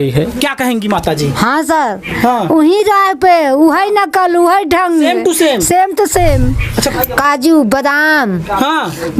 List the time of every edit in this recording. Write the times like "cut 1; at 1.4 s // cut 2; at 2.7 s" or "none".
cut 1; at 6.9 s